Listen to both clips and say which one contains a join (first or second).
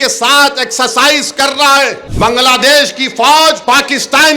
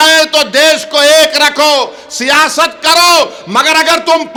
first